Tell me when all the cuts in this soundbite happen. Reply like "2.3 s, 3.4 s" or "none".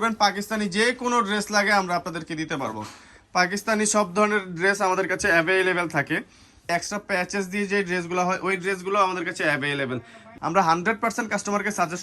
6.7 s, 10.2 s